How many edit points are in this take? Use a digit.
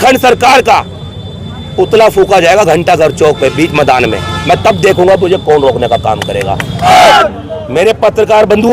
1